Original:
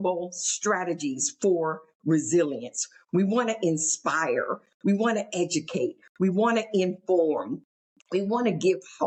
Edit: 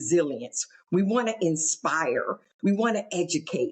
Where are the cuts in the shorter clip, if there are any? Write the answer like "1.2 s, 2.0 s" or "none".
none